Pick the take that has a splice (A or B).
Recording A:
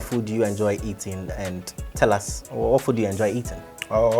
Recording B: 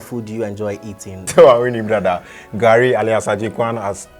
B